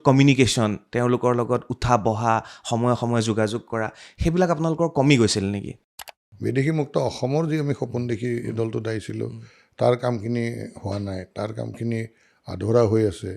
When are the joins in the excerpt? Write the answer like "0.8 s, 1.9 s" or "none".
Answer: 5.7 s